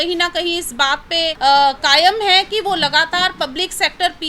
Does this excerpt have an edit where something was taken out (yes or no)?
yes